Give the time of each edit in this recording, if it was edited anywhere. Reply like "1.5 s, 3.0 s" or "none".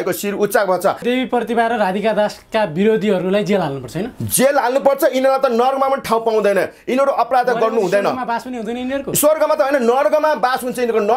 1.0 s